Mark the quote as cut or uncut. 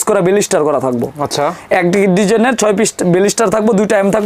uncut